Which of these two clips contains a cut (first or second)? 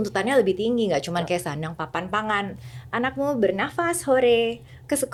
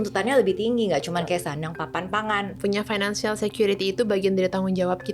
second